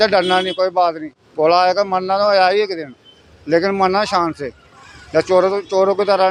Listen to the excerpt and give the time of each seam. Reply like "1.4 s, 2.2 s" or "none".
none